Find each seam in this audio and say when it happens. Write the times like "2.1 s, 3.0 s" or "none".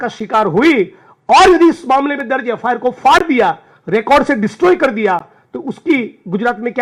none